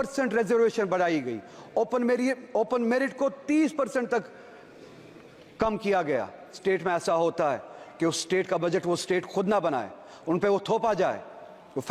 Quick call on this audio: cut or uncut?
cut